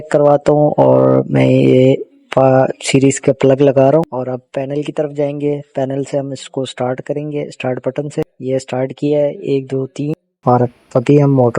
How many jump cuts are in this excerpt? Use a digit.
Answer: 1